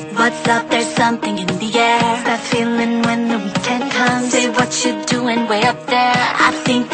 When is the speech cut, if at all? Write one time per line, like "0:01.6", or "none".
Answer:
0:02.2